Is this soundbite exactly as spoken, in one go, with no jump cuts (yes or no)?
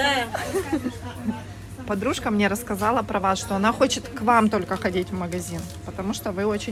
yes